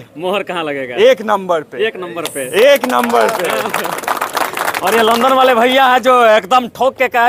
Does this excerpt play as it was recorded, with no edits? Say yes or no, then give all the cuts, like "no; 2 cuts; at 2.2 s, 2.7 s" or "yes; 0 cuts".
yes; 0 cuts